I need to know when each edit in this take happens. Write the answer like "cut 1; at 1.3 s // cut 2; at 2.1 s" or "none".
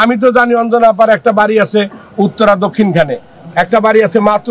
none